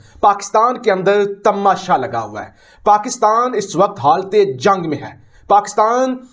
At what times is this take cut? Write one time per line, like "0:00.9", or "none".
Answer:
none